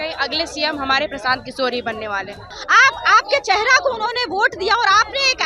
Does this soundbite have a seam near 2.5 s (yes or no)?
yes